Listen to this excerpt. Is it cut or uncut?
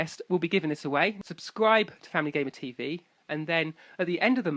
cut